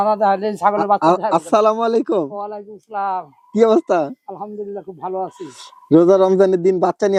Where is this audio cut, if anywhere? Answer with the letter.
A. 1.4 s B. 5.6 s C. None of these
C